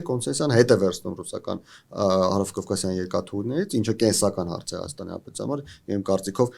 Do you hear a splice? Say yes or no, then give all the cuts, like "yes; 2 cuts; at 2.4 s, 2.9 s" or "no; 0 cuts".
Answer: no; 0 cuts